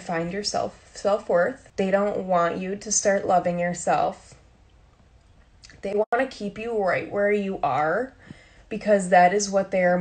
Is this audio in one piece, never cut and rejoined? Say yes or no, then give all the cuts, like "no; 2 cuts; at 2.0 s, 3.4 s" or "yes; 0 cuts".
no; 1 cut; at 1.6 s